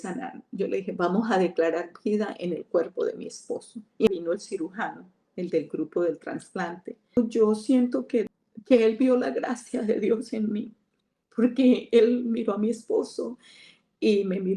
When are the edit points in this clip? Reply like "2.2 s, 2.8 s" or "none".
4.1 s, 7.2 s, 8.4 s